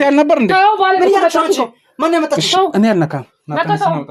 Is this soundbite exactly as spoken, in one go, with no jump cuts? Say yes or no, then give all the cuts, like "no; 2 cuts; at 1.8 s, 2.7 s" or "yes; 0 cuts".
yes; 0 cuts